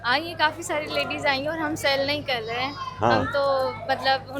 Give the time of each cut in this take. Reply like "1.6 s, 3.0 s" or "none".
none